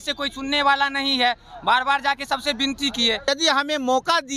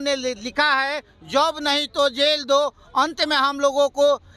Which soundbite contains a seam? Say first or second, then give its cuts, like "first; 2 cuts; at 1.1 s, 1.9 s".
first; 1 cut; at 3.3 s